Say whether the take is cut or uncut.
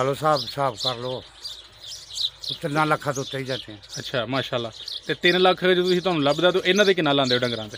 uncut